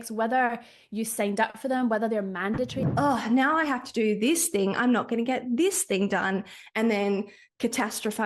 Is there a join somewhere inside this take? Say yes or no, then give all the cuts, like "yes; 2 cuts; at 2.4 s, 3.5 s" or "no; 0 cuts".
yes; 1 cut; at 2.8 s